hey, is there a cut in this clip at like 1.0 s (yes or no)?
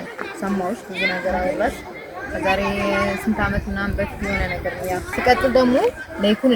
no